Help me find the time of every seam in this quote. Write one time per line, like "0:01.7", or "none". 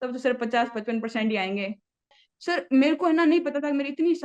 0:02.2